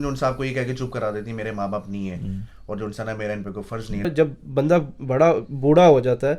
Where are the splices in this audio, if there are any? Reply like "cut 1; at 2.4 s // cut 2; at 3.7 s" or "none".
cut 1; at 4.1 s